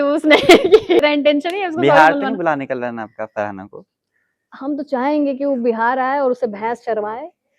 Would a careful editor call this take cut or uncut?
cut